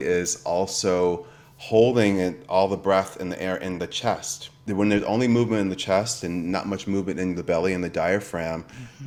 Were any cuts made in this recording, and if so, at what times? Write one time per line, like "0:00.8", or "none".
none